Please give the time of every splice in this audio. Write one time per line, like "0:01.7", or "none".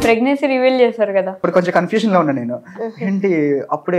0:01.4